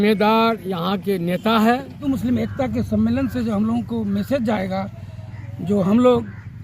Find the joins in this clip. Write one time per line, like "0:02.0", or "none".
0:02.0